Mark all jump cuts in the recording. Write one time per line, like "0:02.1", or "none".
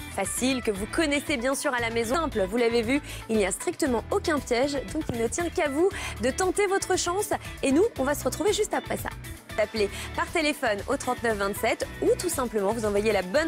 0:02.3